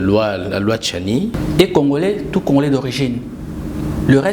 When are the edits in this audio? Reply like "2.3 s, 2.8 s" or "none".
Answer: 1.3 s